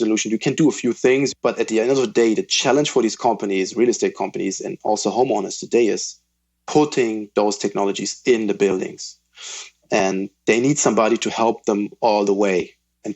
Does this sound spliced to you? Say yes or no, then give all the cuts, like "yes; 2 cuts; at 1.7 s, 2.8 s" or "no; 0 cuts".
yes; 1 cut; at 1.3 s